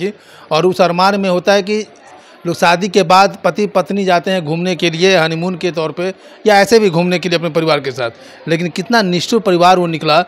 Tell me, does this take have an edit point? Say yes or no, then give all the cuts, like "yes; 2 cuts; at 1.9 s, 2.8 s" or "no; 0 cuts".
no; 0 cuts